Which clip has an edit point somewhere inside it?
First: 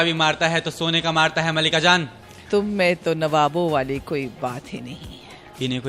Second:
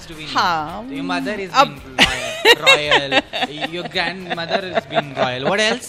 first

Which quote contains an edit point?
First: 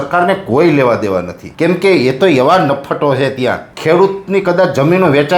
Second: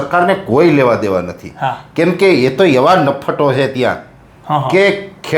first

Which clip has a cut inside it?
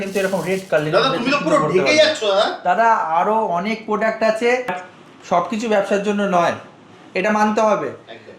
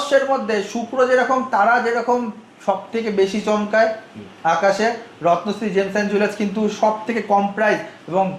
first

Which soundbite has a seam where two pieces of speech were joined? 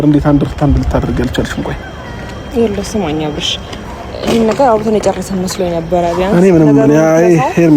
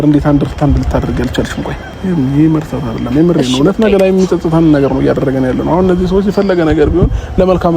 second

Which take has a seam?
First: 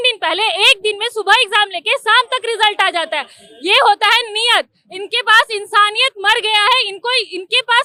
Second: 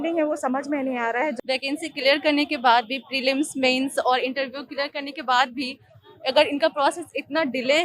second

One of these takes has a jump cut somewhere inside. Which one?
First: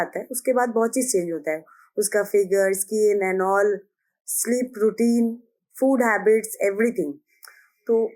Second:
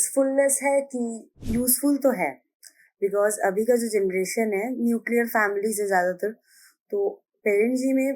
second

